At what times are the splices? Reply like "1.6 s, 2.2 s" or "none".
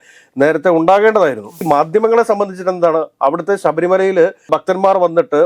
1.5 s

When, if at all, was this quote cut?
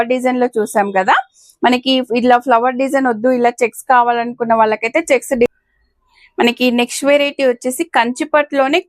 5.5 s

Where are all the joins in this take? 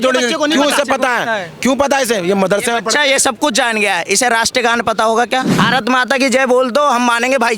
5.5 s

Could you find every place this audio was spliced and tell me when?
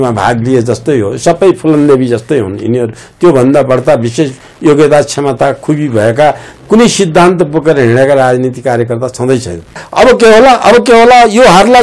9.8 s

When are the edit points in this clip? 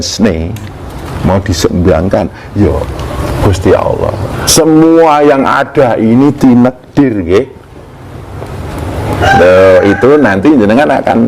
4.5 s

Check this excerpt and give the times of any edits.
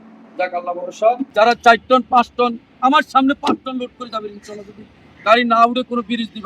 1.2 s

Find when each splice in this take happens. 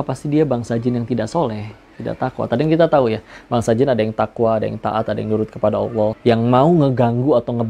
none

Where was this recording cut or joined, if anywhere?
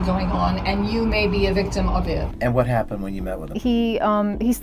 2.3 s

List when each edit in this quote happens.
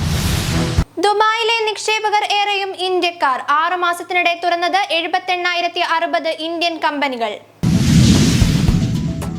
7.5 s

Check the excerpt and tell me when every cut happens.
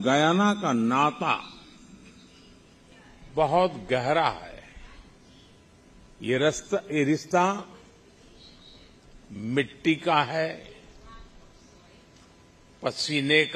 none

